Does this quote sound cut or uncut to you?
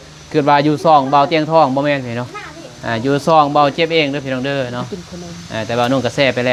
uncut